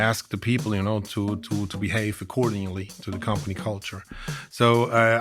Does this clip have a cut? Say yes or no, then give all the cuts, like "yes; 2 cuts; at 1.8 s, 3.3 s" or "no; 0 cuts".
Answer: no; 0 cuts